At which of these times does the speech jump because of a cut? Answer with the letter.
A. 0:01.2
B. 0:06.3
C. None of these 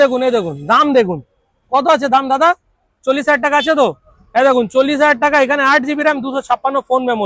C